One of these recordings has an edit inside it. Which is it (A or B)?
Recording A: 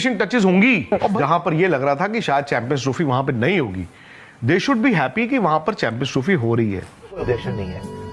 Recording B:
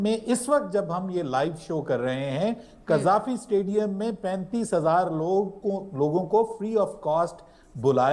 A